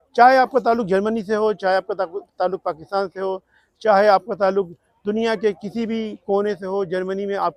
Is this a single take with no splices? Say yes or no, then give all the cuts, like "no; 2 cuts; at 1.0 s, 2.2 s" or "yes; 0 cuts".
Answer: yes; 0 cuts